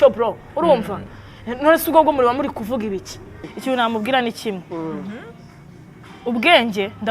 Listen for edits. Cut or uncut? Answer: cut